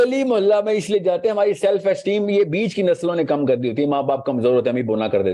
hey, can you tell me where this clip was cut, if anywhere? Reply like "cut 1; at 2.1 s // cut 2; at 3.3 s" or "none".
none

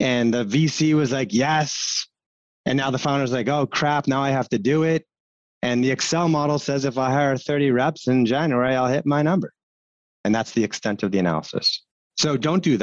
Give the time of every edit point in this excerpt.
cut 1; at 11.8 s

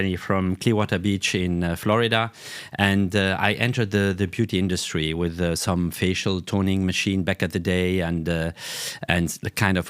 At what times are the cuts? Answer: none

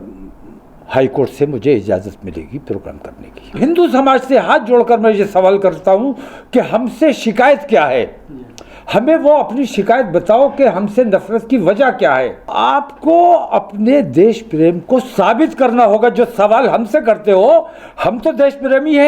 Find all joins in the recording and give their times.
cut 1; at 3.6 s // cut 2; at 12.5 s

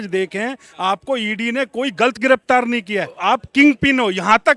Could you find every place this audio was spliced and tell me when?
cut 1; at 3.1 s

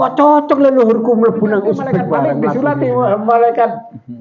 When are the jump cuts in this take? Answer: cut 1; at 2.4 s

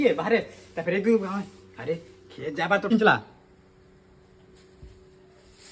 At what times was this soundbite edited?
cut 1; at 2.9 s

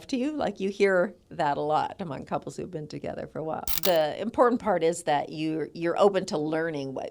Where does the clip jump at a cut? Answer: cut 1; at 1.2 s // cut 2; at 3.7 s

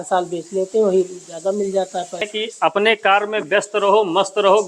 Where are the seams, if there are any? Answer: cut 1; at 2.3 s

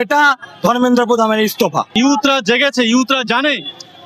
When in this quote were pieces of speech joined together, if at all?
cut 1; at 1.9 s

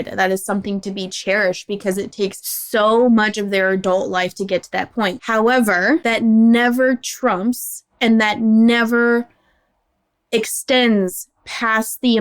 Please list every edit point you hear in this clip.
cut 1; at 2.5 s // cut 2; at 5.2 s // cut 3; at 6.0 s

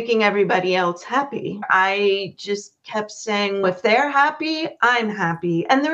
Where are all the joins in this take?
cut 1; at 1.6 s

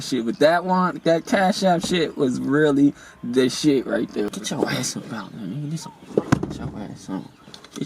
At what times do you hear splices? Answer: cut 1; at 4.3 s

